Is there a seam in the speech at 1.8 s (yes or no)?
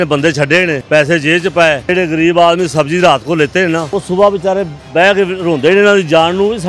yes